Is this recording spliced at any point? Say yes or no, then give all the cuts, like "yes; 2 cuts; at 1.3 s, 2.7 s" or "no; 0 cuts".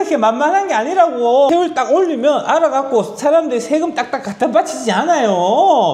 yes; 1 cut; at 1.5 s